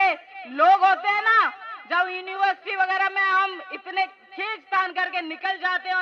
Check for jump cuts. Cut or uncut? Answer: uncut